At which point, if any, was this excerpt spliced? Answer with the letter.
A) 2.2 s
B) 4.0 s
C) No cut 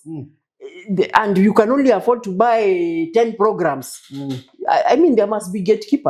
C